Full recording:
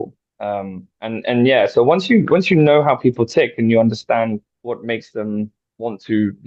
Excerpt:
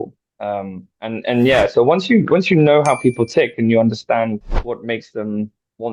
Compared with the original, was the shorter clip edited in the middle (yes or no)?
no